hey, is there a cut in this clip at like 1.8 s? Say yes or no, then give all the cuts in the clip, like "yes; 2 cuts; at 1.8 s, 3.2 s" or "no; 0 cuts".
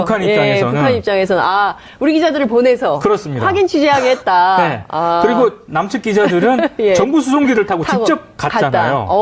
yes; 1 cut; at 1.8 s